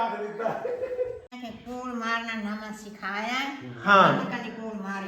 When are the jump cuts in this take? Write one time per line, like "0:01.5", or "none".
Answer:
0:01.3